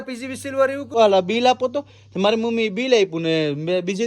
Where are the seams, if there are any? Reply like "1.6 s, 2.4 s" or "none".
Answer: 0.9 s